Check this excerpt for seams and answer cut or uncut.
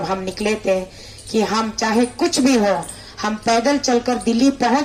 uncut